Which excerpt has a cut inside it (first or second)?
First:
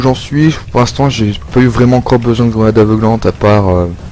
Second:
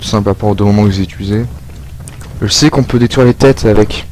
first